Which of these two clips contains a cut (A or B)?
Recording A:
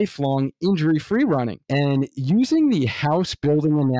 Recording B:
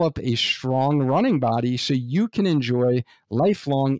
A